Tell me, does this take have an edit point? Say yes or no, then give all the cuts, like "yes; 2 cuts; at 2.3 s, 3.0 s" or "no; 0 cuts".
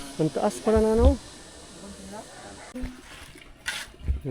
yes; 1 cut; at 2.7 s